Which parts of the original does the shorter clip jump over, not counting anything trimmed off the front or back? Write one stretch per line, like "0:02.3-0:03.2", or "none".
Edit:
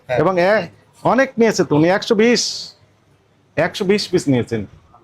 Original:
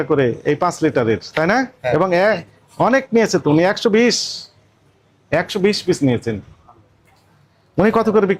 none